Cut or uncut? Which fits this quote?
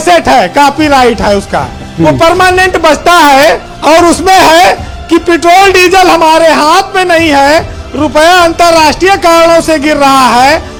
uncut